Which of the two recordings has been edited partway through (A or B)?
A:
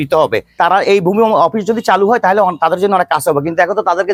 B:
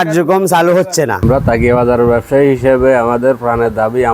B